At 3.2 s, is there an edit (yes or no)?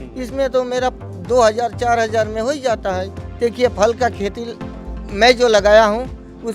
yes